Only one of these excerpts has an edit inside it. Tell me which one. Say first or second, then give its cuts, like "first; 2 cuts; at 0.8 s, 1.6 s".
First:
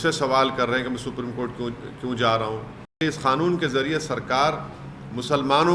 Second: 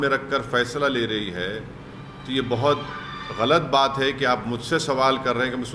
first; 1 cut; at 3.0 s